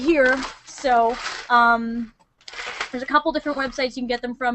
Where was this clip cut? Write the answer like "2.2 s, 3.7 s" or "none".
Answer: none